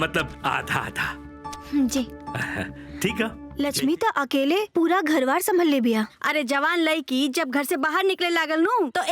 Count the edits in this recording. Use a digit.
1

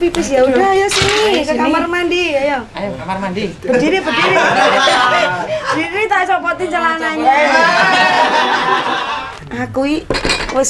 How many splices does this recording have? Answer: 1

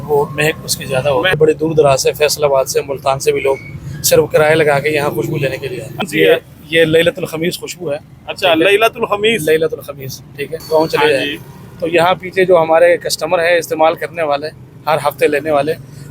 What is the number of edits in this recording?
3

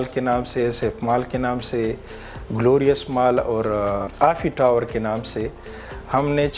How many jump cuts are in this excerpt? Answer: 1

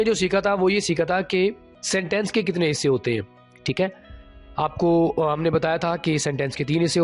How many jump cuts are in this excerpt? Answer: 1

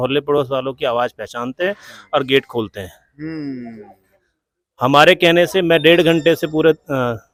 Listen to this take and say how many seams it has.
0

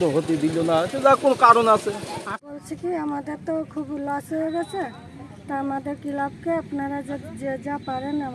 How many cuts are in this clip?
1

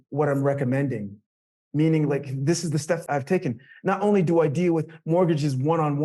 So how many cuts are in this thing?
1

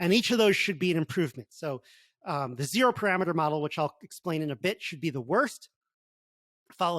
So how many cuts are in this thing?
0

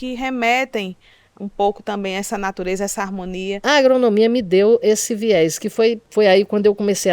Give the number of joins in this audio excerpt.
2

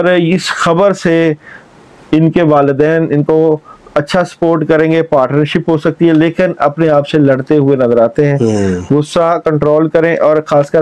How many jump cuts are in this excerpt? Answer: 0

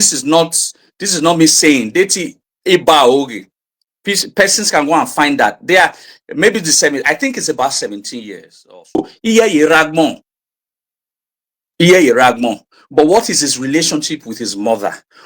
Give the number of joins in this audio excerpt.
1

